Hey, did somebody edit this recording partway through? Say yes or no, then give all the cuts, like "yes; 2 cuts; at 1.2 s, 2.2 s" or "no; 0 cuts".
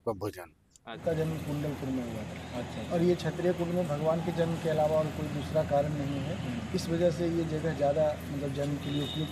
yes; 1 cut; at 0.9 s